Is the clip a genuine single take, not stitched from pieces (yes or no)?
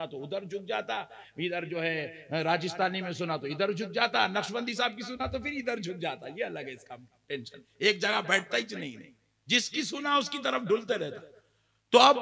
yes